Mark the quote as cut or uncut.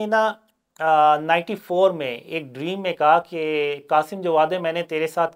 uncut